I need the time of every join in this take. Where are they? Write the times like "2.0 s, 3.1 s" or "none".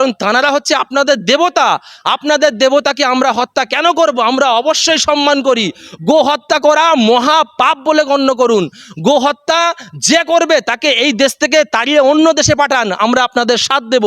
none